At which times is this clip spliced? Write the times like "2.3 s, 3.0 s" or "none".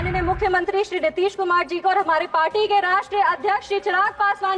none